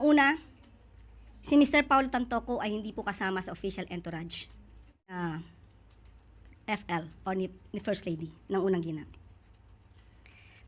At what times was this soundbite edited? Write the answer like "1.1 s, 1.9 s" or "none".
5.2 s